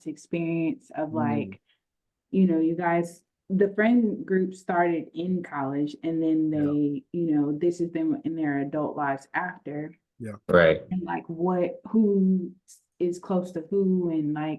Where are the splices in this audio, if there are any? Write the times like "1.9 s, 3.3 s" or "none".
none

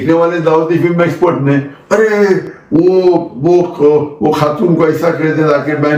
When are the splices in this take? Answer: none

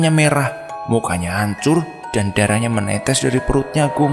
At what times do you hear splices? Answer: 2.0 s

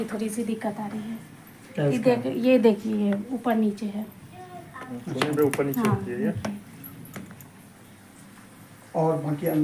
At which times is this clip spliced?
none

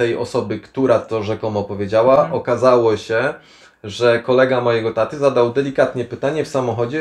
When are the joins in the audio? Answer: none

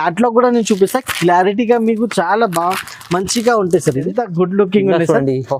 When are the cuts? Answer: 4.1 s

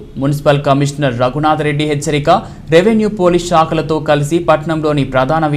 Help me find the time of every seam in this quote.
none

